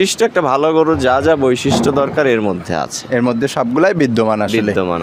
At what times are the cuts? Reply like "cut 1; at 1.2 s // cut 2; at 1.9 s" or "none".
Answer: none